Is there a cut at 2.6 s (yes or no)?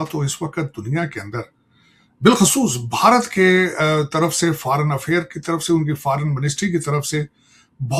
no